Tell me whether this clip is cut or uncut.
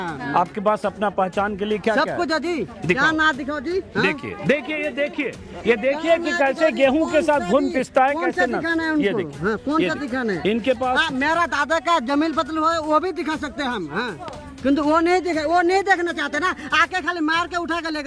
uncut